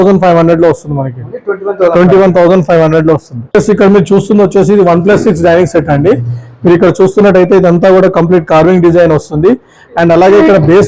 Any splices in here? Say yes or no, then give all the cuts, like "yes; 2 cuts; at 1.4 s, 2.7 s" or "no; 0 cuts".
no; 0 cuts